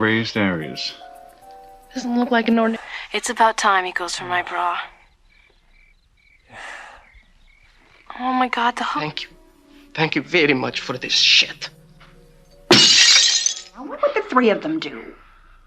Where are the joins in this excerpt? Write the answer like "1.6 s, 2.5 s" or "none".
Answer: 2.7 s, 8.9 s, 13.9 s

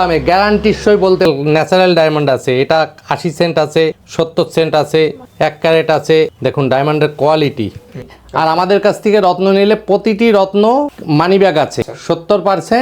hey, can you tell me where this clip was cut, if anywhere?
1.3 s, 4.0 s, 5.2 s, 6.3 s, 8.2 s

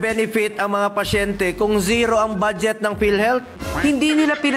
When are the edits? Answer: 3.5 s

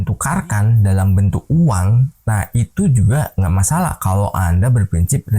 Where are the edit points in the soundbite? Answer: none

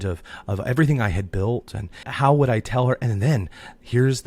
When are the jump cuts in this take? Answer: 2.0 s

